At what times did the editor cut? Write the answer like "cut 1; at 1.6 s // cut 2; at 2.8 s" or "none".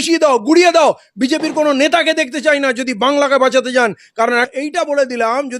cut 1; at 4.5 s